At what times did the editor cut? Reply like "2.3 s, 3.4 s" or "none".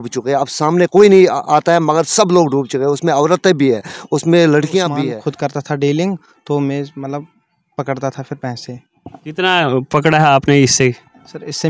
5.0 s

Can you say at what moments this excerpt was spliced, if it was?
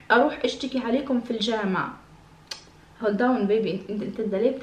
none

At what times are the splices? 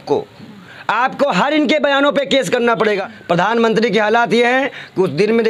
3.1 s

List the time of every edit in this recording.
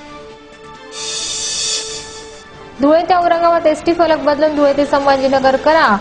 1.1 s

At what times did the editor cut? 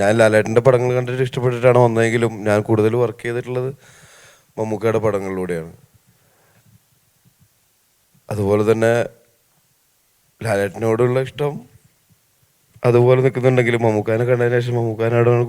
none

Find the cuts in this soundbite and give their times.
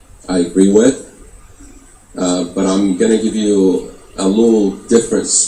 none

